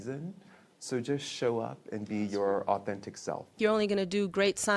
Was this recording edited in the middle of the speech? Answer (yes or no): yes